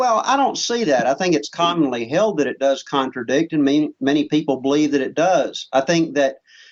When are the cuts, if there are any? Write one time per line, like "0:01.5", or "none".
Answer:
none